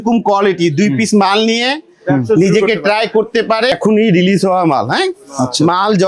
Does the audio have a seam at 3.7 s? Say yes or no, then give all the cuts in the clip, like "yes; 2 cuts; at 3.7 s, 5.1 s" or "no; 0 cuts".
yes; 1 cut; at 3.7 s